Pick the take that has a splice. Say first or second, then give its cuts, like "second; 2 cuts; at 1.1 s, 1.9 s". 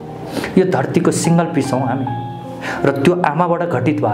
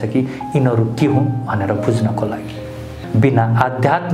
second; 1 cut; at 3.0 s